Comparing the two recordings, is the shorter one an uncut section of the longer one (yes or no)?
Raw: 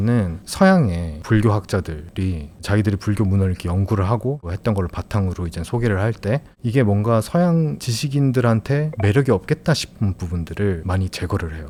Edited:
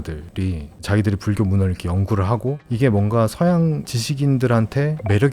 no